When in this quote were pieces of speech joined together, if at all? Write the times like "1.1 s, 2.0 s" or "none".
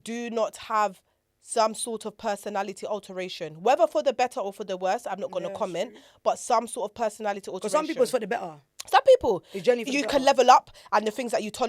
none

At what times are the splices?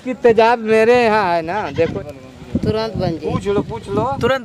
1.9 s

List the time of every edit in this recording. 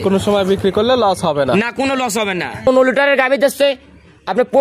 2.7 s

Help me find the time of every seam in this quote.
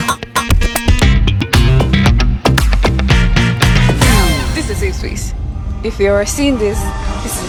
none

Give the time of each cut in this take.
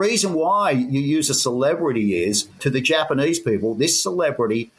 2.6 s

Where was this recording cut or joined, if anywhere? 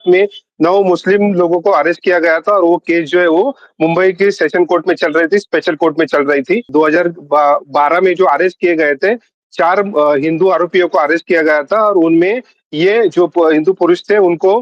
6.7 s

